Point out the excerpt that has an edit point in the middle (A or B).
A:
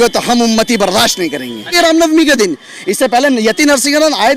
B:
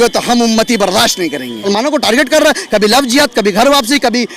B